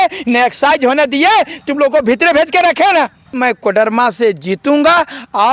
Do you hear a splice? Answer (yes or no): yes